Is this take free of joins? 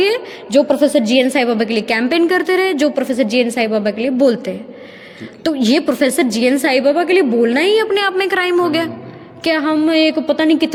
yes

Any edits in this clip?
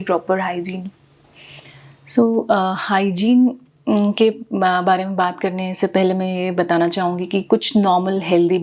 no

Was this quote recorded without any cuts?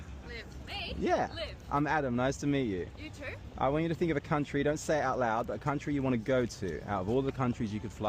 no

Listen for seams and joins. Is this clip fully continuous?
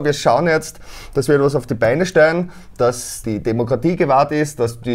yes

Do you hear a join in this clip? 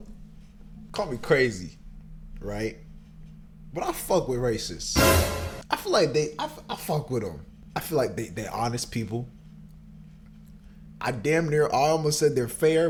no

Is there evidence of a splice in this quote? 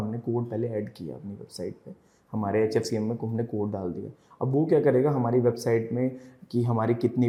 no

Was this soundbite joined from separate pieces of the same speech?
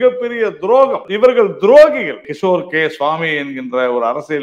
yes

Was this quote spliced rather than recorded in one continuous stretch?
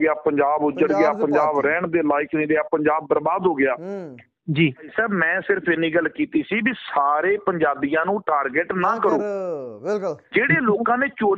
yes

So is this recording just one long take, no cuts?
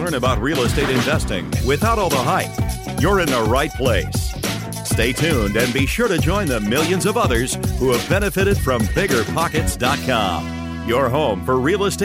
yes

